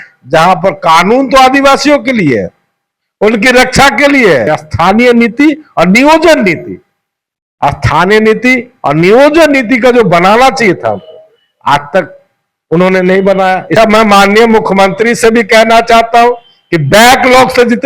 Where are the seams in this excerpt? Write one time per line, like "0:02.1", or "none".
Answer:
0:04.5
0:13.8